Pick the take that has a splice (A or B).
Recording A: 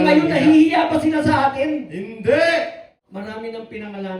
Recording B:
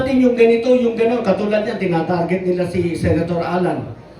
A